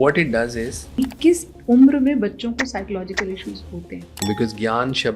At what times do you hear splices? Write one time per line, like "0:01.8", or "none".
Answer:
0:00.9
0:04.2